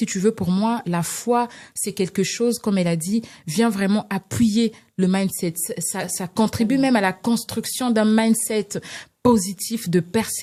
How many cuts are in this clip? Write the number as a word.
zero